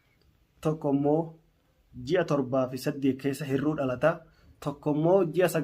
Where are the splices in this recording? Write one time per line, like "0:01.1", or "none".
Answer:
none